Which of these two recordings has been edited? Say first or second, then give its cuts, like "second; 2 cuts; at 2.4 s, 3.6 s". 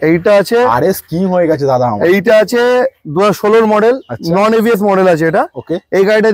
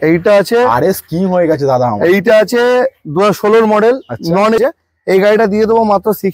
second; 1 cut; at 4.6 s